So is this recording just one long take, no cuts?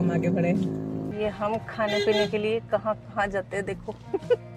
no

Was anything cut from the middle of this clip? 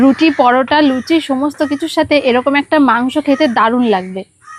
no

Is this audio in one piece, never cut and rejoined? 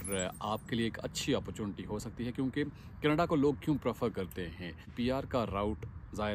no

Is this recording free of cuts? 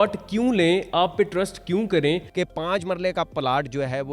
no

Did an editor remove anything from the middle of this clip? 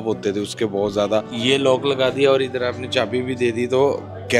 yes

